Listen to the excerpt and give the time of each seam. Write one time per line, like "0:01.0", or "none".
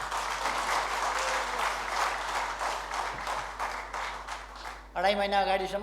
none